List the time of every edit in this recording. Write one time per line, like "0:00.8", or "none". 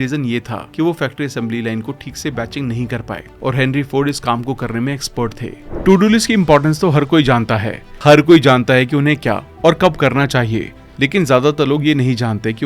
0:05.6